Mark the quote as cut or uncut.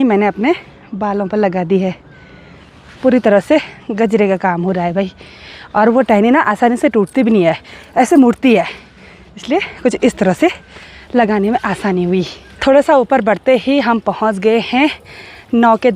uncut